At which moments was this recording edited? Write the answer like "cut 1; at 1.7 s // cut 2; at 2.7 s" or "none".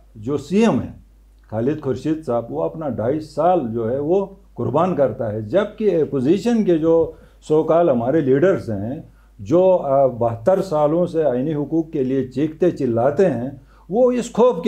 none